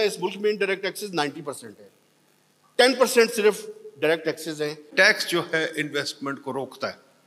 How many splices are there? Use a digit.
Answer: 1